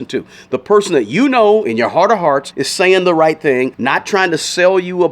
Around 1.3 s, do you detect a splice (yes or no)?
no